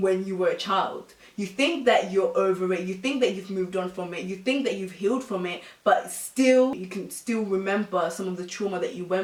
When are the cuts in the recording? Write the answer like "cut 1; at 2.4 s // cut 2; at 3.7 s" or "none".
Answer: none